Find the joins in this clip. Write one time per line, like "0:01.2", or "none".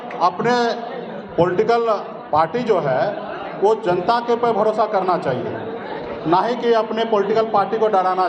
none